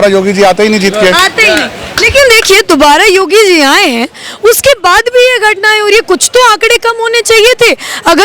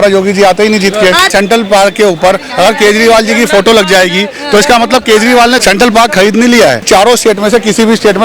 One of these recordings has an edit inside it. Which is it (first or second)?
second